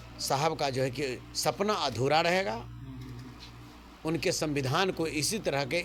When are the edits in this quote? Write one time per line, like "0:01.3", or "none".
none